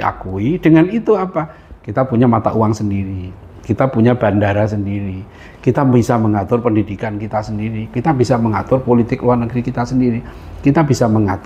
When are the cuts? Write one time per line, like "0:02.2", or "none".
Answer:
none